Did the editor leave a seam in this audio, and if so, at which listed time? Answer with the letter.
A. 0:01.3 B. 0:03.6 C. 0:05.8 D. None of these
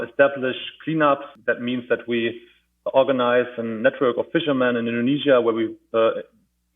A